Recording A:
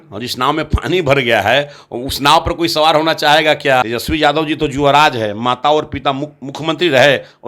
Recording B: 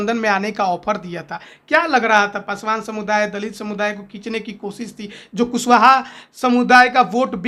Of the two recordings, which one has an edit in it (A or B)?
A